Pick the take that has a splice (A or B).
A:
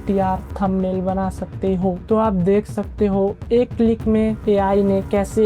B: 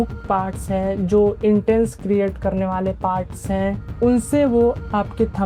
A